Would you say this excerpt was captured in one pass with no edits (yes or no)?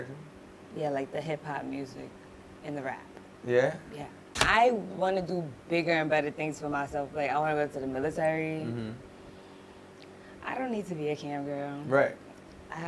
no